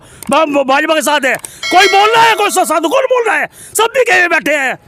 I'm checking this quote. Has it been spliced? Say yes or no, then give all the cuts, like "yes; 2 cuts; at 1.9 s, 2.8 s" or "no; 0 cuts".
no; 0 cuts